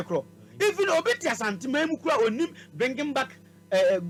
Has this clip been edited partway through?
no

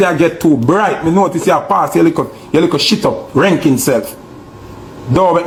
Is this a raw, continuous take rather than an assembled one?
yes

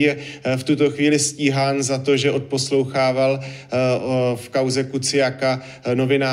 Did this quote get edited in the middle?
no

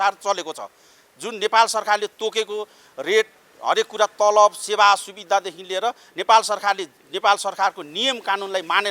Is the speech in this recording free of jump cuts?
yes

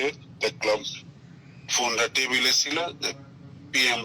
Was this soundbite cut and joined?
no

